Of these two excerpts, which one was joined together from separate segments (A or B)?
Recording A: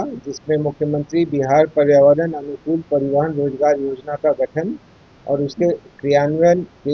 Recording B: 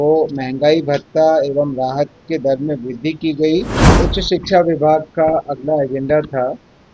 B